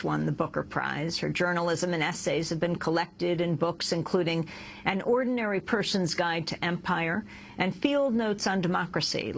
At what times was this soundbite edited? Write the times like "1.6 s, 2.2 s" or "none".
2.1 s